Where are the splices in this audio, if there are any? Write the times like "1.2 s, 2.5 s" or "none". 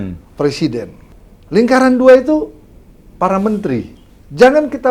1.0 s, 4.0 s